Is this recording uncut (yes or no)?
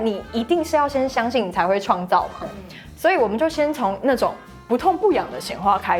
yes